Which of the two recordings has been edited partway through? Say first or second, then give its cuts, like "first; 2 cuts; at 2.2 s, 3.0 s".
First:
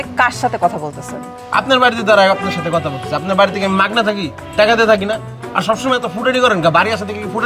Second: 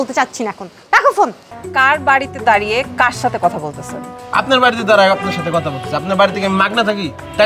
second; 1 cut; at 1.4 s